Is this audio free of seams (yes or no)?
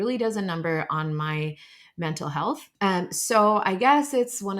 no